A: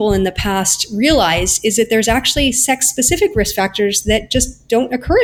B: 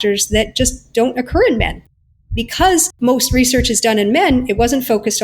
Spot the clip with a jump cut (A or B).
B